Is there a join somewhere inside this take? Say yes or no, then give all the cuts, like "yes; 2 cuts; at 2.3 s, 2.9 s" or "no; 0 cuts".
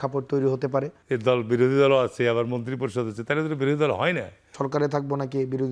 yes; 2 cuts; at 1.0 s, 4.6 s